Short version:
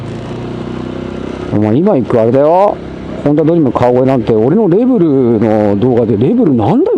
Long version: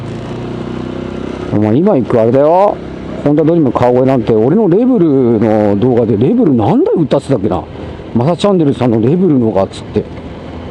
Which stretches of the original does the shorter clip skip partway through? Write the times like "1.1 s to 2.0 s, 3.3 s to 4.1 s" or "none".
none